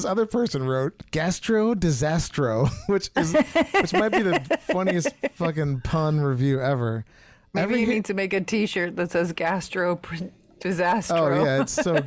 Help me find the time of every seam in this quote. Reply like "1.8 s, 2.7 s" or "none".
1.0 s